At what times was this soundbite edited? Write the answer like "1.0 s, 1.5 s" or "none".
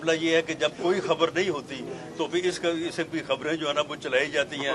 none